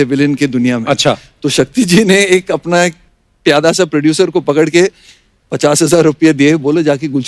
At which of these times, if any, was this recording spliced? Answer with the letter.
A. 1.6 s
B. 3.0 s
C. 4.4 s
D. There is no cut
D